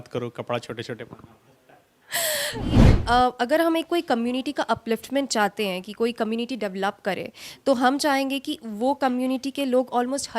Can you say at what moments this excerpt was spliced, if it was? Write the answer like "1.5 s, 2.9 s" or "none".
2.9 s